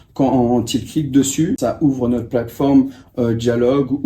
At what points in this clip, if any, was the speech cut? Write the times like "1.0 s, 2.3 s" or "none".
1.6 s